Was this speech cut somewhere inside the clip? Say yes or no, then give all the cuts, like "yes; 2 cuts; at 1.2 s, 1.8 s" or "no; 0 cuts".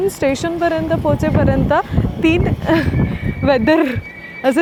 no; 0 cuts